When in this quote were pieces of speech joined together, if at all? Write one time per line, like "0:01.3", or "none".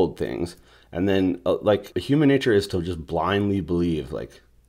0:01.9